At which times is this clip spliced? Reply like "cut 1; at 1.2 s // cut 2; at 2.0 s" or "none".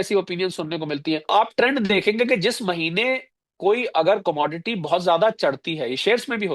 cut 1; at 1.3 s